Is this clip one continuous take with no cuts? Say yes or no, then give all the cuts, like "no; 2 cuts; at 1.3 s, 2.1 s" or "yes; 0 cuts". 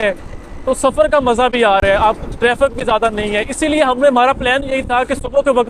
yes; 0 cuts